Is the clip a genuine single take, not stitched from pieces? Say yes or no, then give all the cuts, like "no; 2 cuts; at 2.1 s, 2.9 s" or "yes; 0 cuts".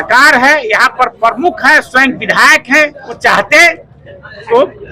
no; 1 cut; at 3.2 s